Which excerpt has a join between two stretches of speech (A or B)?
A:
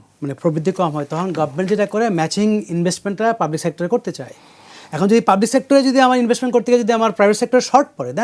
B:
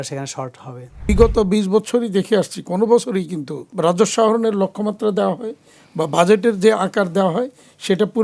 B